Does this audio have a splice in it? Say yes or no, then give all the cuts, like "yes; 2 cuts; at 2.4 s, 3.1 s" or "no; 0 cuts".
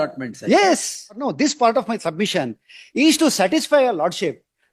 no; 0 cuts